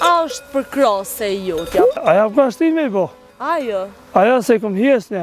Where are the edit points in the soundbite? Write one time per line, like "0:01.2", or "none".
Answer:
0:02.0

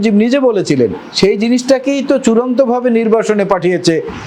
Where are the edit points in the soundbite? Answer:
0:01.0

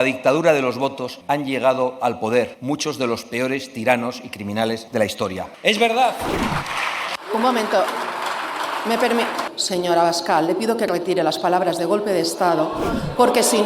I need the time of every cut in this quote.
0:01.1
0:02.6
0:05.0
0:09.5

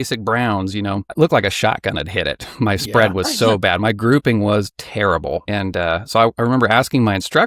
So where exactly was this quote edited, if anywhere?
0:01.1
0:05.5

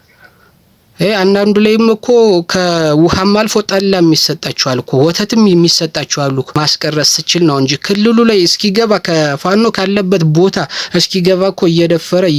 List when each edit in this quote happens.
0:06.6

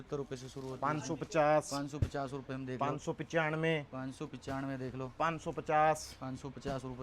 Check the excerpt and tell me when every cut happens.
none

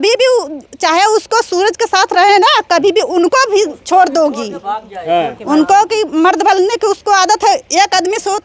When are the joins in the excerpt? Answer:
none

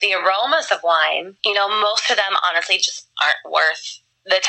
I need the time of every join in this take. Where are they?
0:01.3

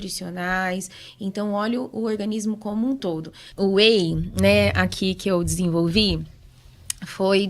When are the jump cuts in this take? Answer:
0:03.4

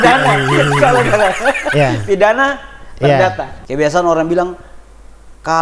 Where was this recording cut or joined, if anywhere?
0:03.5

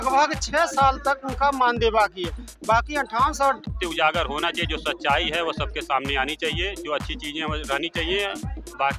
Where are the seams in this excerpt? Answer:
0:03.7

